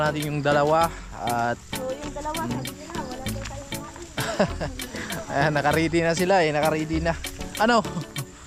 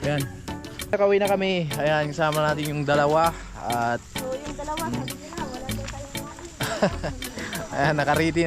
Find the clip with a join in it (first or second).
second